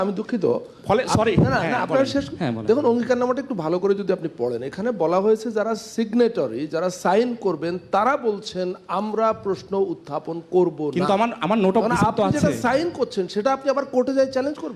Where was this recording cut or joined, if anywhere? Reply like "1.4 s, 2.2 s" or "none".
none